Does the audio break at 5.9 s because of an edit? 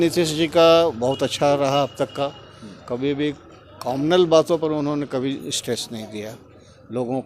no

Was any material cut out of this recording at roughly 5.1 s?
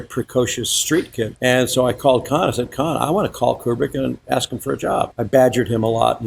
yes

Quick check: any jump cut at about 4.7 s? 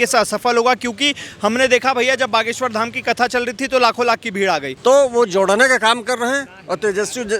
yes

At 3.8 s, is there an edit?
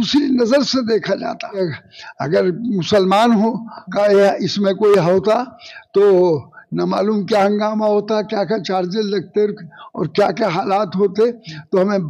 no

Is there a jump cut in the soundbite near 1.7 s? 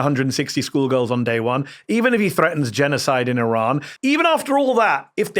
no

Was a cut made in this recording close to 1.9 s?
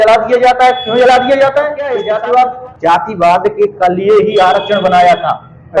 yes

